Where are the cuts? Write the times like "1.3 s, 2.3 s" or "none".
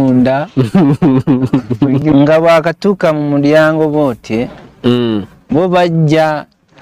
2.0 s